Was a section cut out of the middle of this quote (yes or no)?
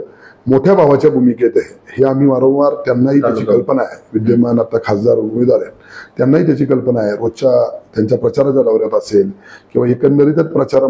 no